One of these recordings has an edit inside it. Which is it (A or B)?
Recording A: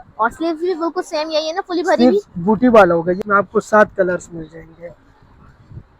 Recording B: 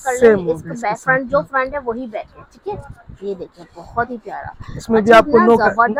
A